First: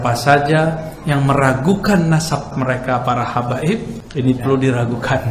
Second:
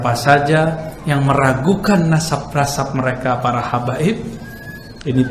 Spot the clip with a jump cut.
first; 2 cuts; at 2.5 s, 4.0 s

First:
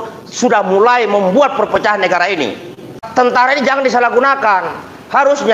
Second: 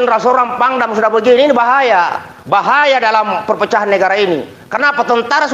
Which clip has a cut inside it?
first; 1 cut; at 3.0 s

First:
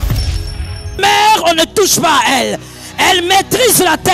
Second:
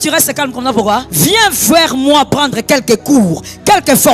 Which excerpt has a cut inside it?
second; 1 cut; at 1.1 s

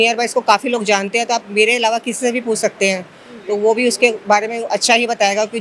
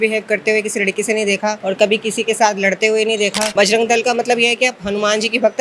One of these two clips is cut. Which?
second; 2 cuts; at 1.6 s, 3.4 s

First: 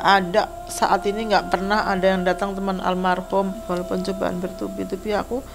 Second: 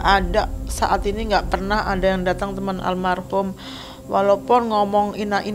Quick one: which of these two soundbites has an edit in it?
first; 1 cut; at 3.6 s

